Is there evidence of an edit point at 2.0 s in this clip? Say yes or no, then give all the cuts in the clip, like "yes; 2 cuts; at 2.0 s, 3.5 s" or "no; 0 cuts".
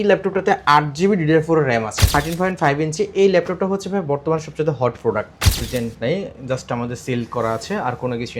yes; 2 cuts; at 2.0 s, 5.7 s